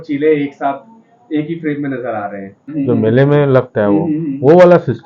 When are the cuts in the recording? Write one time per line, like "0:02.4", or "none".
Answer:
0:02.6